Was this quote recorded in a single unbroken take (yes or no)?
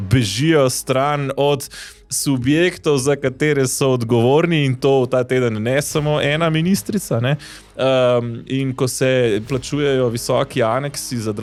yes